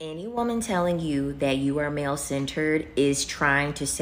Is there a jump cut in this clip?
no; 0 cuts

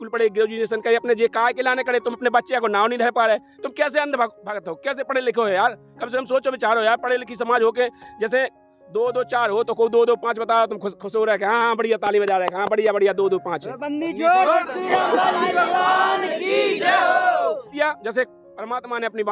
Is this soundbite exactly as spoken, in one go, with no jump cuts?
no; 1 cut; at 17.7 s

